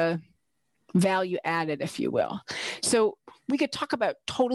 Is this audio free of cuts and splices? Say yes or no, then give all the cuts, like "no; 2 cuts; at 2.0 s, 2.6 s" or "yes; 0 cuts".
no; 1 cut; at 3.2 s